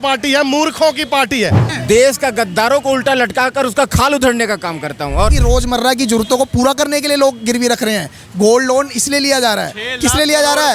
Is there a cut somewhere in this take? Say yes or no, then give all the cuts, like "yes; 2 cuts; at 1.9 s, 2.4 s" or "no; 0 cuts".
yes; 2 cuts; at 1.7 s, 5.3 s